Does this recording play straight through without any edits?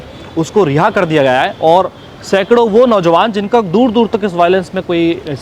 yes; 0 cuts

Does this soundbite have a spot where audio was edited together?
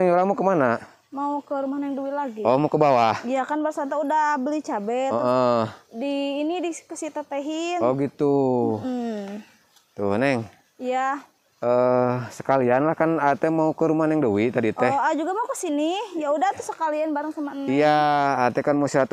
no; 0 cuts

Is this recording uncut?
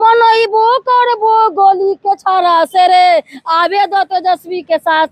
yes; 0 cuts

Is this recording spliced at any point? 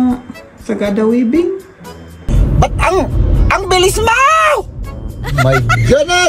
yes; 1 cut; at 2.4 s

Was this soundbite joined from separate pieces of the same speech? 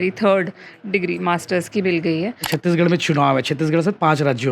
yes; 1 cut; at 2.5 s

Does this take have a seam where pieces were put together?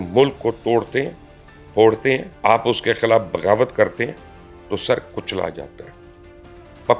yes; 1 cut; at 2.3 s

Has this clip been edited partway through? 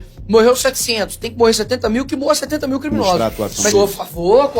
yes; 1 cut; at 3.2 s

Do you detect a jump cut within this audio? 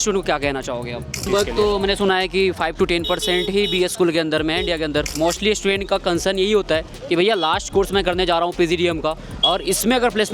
yes; 2 cuts; at 1.3 s, 5.2 s

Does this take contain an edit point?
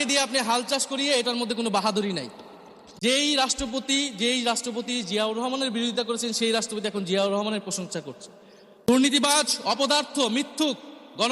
yes; 2 cuts; at 3.0 s, 8.8 s

